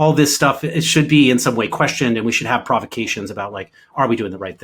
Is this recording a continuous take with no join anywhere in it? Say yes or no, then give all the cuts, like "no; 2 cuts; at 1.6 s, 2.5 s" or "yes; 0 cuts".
yes; 0 cuts